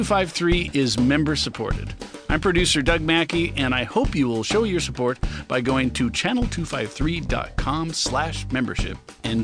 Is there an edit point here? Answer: no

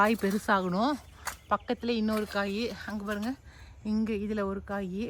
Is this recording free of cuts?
yes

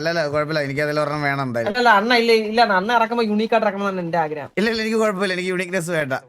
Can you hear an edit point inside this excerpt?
no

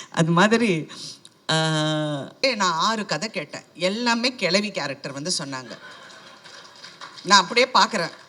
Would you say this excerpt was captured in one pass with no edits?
no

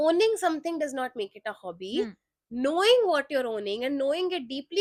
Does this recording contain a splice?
no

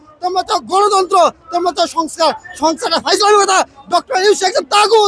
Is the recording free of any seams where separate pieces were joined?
yes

